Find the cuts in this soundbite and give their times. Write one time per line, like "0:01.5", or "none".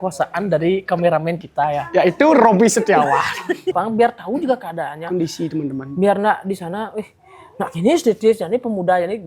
0:03.7